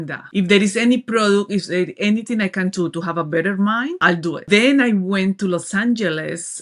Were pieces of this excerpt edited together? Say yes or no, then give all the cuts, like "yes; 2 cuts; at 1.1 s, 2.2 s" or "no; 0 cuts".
no; 0 cuts